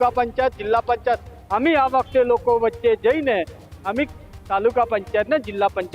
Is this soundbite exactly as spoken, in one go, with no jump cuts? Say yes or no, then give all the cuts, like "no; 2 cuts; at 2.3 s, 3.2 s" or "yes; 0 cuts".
yes; 0 cuts